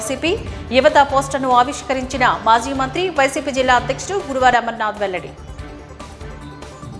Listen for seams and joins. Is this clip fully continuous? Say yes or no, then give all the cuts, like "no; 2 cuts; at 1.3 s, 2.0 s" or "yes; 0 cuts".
no; 1 cut; at 5.3 s